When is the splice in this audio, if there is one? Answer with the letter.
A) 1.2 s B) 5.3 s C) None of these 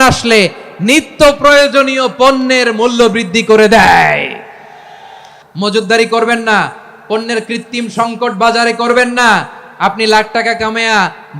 B